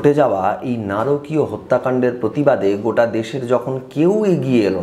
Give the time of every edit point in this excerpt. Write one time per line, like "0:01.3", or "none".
none